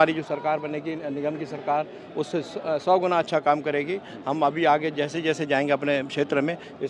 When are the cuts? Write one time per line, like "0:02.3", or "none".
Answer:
none